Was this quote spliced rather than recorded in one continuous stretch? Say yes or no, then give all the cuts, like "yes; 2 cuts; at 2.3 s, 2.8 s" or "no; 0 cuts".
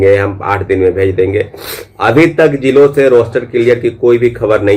no; 0 cuts